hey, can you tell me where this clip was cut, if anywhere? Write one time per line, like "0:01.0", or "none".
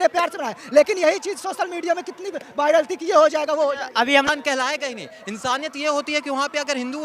0:04.3